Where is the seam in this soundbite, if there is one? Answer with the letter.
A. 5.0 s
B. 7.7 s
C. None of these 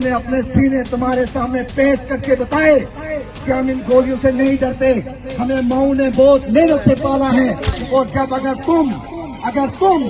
B